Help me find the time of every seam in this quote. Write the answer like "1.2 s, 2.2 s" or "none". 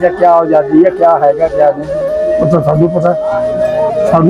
none